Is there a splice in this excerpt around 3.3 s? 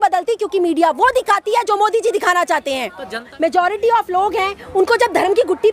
yes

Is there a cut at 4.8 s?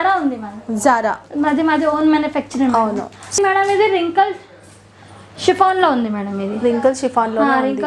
no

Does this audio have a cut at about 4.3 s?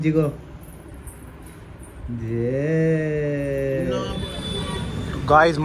yes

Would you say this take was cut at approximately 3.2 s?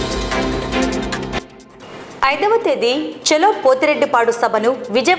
no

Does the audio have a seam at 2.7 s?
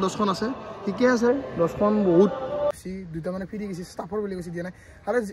yes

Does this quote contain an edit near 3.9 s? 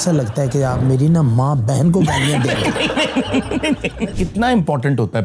yes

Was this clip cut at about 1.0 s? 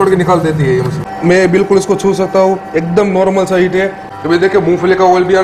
yes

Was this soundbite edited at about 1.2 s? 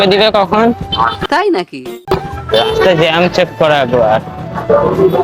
no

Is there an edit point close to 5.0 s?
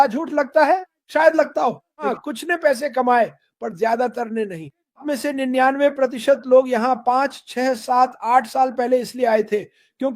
yes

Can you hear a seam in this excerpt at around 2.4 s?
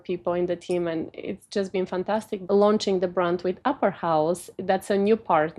yes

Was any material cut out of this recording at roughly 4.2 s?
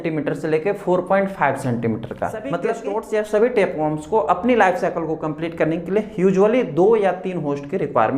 no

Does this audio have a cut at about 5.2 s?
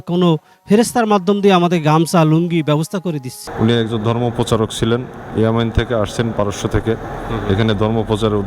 no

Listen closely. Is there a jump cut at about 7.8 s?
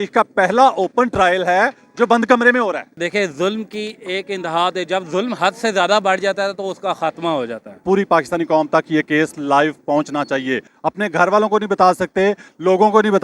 yes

